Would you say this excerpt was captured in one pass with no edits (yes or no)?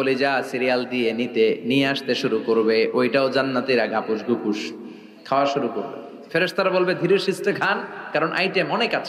yes